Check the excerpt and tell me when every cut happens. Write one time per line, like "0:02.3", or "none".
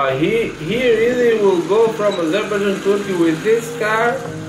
none

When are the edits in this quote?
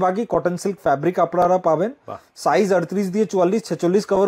none

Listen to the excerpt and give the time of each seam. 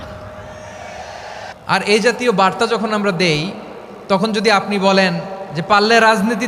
0:01.5

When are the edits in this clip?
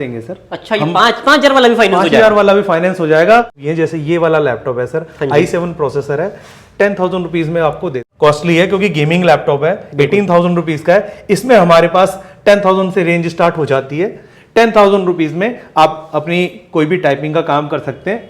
0:03.6
0:08.0

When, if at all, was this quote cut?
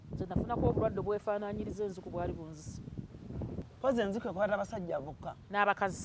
0:03.7

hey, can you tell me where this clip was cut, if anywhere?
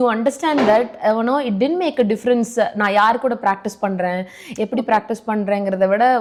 none

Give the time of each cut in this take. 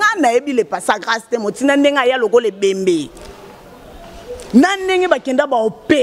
none

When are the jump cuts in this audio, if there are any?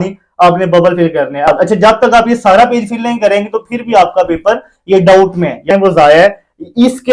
0:01.5
0:05.7

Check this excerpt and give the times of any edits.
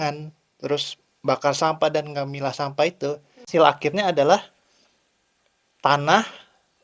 0:03.5

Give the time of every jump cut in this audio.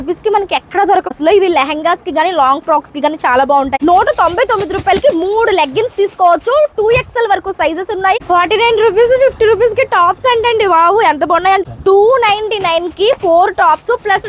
0:01.1
0:03.8
0:08.2
0:11.6

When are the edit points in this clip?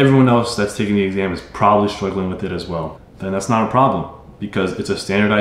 none

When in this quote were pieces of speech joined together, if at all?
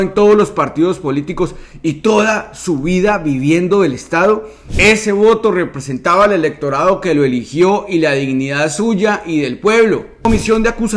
0:04.7
0:10.2

